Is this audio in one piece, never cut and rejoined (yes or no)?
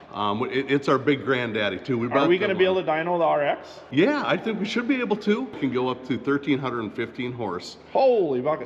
no